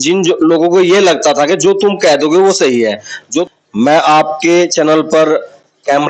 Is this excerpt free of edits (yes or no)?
no